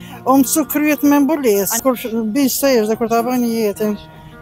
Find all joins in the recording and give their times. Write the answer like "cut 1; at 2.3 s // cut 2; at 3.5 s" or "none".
cut 1; at 1.8 s